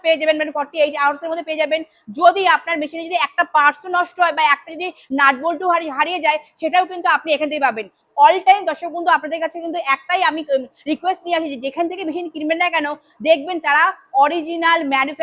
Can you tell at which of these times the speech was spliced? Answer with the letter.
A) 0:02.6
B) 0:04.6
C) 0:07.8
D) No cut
D